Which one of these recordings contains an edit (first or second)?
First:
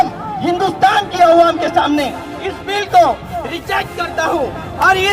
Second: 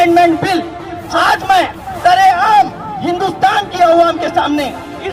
second